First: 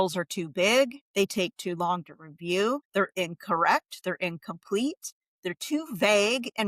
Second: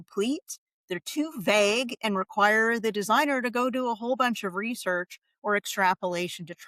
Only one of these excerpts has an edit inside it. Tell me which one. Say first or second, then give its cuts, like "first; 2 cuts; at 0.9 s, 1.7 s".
first; 2 cuts; at 1.0 s, 2.8 s